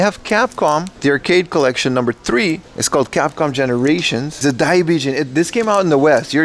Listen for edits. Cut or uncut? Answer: cut